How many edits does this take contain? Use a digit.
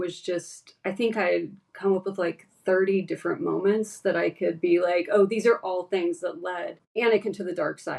1